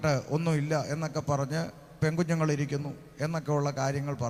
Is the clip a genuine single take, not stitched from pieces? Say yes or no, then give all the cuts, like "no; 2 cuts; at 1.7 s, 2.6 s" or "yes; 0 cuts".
yes; 0 cuts